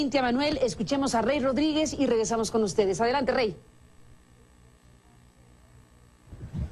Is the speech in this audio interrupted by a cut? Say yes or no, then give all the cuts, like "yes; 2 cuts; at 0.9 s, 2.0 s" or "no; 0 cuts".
no; 0 cuts